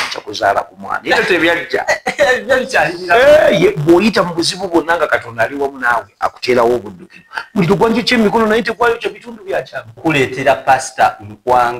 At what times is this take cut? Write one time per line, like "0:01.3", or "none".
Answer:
0:09.9